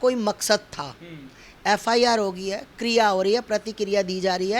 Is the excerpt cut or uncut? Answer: uncut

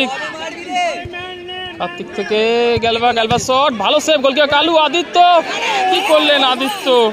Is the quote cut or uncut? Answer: uncut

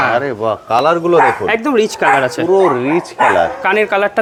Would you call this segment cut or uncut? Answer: uncut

